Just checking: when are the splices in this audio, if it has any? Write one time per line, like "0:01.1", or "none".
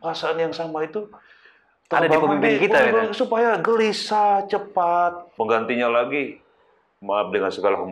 0:05.3